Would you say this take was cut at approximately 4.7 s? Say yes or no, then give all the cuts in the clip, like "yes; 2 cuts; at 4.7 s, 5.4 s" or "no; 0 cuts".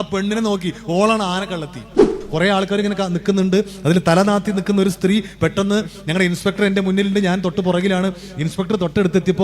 no; 1 cut; at 2.0 s